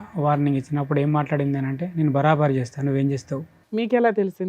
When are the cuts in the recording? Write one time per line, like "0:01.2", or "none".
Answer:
0:03.5